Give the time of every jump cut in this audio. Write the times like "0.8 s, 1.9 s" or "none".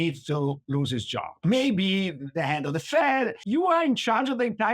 1.4 s, 3.4 s